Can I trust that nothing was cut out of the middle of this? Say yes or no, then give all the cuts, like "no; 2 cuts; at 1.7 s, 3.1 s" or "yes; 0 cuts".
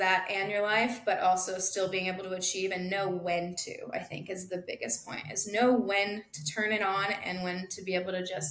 yes; 0 cuts